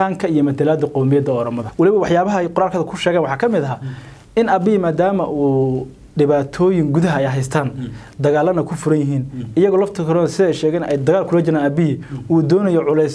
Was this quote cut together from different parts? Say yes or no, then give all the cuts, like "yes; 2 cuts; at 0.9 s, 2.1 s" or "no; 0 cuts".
yes; 1 cut; at 1.6 s